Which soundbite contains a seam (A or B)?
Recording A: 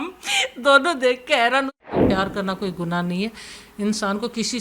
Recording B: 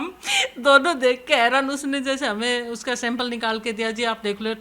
A